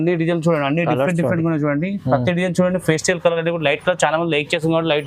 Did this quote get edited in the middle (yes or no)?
no